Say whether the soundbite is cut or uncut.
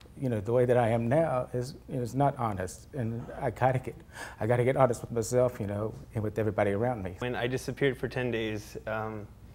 cut